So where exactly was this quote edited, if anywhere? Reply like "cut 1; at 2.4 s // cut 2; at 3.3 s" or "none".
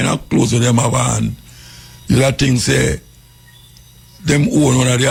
none